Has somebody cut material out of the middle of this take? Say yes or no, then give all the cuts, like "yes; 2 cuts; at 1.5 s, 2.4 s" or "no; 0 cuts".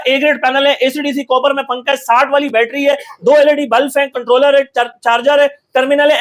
no; 0 cuts